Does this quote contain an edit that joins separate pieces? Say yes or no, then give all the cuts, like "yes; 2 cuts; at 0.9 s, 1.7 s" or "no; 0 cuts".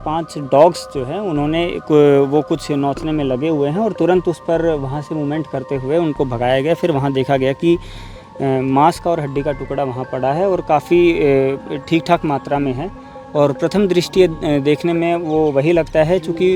no; 0 cuts